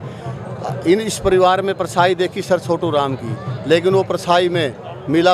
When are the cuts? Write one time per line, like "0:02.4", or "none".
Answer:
none